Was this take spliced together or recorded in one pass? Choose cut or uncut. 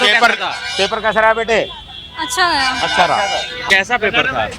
cut